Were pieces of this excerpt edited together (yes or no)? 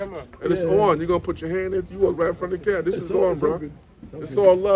no